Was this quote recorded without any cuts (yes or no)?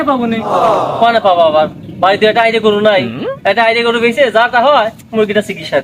yes